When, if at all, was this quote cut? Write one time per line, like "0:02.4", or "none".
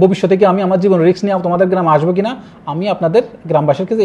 none